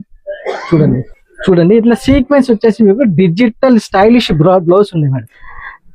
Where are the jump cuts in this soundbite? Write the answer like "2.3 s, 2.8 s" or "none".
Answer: 1.1 s